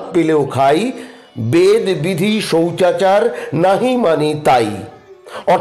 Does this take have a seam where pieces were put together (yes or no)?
no